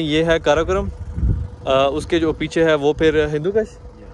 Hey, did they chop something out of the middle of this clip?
no; 0 cuts

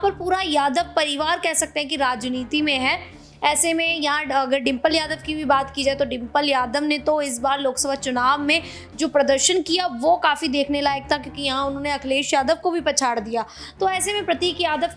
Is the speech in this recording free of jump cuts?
yes; 0 cuts

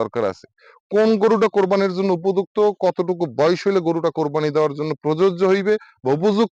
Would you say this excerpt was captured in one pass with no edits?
yes; 0 cuts

